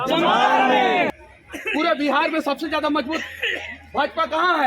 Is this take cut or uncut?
cut